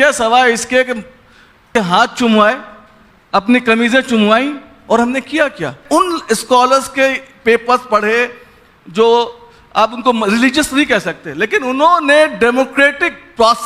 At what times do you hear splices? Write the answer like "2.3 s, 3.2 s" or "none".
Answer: 1.7 s, 5.8 s